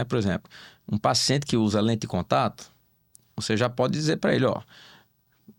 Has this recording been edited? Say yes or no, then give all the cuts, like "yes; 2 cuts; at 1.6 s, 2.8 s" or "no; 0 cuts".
no; 0 cuts